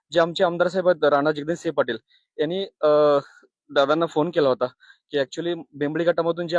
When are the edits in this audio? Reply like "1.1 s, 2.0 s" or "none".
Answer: none

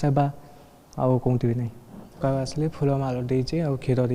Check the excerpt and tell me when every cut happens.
2.2 s

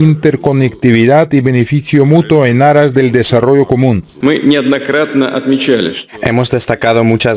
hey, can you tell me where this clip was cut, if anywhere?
4.3 s

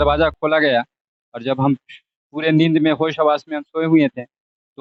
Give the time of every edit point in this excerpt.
none

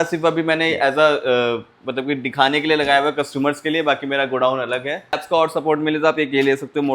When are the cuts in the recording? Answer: 5.2 s

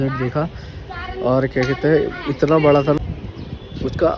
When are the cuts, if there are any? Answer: 3.0 s

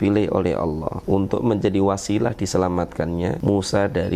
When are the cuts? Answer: 0.9 s, 3.4 s

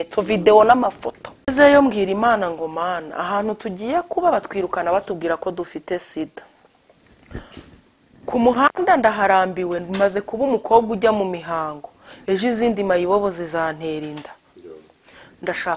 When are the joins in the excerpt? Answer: 1.5 s

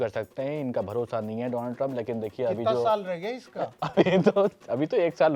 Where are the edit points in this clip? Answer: none

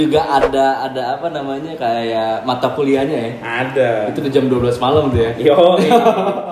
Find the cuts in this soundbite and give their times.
none

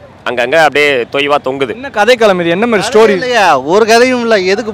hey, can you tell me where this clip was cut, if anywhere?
1.8 s

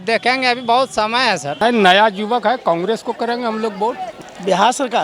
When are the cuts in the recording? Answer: 1.6 s, 4.1 s

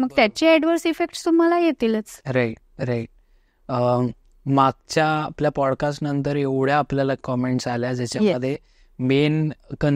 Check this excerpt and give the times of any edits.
none

